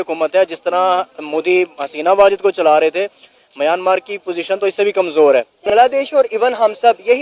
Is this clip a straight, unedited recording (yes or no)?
no